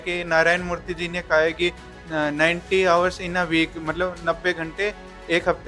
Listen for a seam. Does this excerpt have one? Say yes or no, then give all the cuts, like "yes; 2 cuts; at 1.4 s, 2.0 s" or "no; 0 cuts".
no; 0 cuts